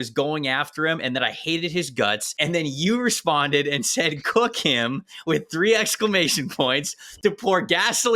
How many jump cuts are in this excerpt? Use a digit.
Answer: 1